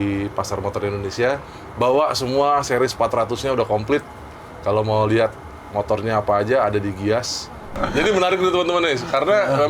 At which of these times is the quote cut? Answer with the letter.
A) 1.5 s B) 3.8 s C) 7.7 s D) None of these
C